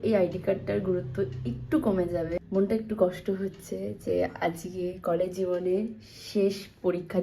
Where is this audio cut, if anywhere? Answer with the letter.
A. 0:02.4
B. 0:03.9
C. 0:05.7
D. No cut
A